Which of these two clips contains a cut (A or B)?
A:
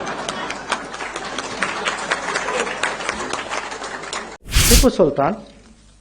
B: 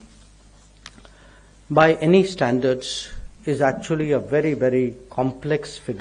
A